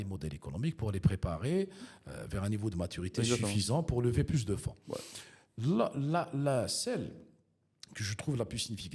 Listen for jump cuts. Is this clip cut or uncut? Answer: uncut